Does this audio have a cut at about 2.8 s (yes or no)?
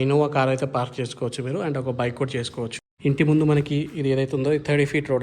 yes